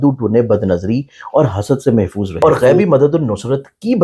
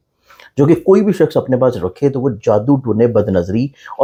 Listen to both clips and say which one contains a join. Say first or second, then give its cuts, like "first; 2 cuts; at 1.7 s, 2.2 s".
first; 1 cut; at 2.6 s